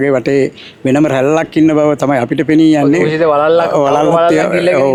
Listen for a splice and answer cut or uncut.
uncut